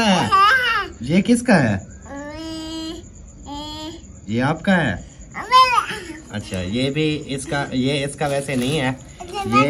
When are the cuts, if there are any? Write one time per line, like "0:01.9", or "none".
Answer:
none